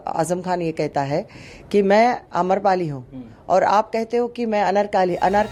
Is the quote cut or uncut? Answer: uncut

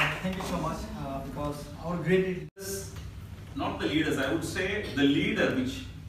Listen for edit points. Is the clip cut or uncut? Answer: cut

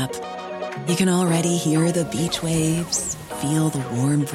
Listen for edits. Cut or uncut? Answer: uncut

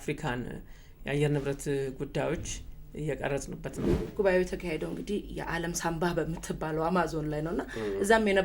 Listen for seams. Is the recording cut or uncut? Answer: cut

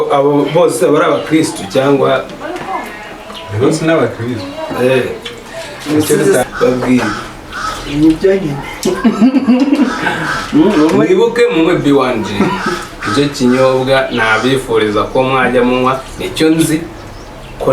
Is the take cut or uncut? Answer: cut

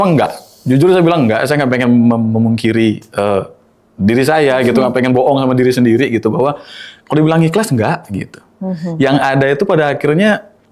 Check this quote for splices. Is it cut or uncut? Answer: uncut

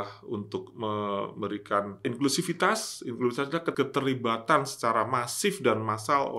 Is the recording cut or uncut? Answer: cut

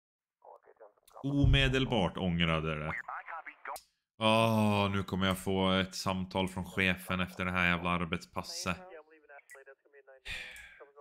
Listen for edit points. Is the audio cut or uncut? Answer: cut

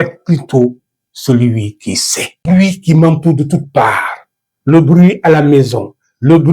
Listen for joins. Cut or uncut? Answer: cut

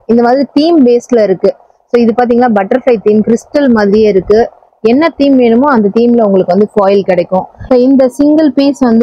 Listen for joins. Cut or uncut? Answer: cut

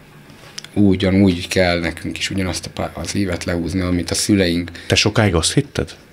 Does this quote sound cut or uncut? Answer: uncut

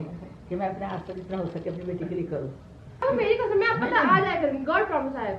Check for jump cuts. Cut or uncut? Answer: cut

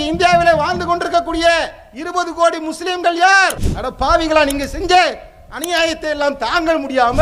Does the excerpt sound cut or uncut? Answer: uncut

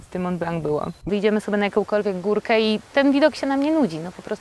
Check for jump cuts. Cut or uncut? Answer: cut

